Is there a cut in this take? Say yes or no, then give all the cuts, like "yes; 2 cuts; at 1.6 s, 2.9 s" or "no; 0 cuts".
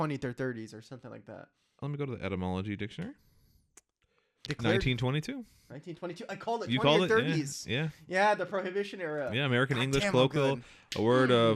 yes; 1 cut; at 4.5 s